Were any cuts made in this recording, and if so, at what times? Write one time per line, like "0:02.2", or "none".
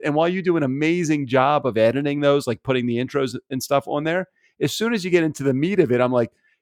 none

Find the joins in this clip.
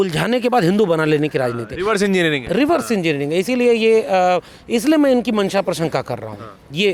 none

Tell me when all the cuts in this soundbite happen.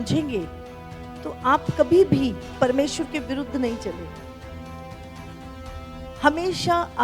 0:02.4

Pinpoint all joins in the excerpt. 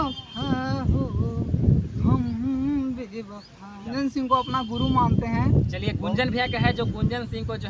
0:03.9

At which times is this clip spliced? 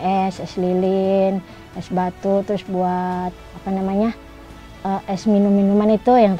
none

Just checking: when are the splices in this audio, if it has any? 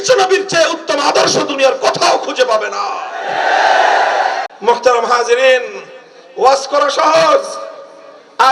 0:04.5

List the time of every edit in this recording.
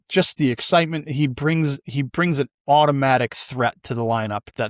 none

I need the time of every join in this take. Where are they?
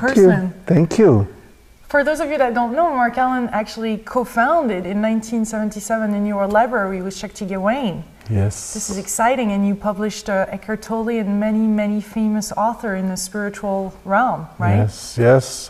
none

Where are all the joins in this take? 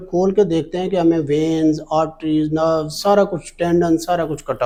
none

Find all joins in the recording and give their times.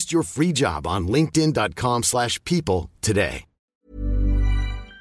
0:03.6

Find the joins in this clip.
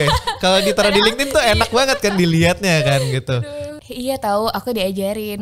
0:03.7

